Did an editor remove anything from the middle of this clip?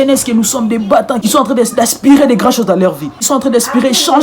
yes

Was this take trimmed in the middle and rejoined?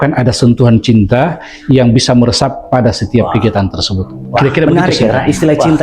yes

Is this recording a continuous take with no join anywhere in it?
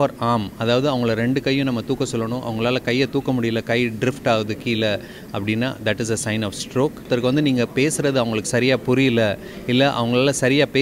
no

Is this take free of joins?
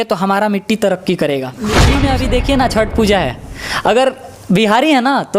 no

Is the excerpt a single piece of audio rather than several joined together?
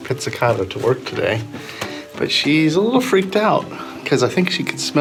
yes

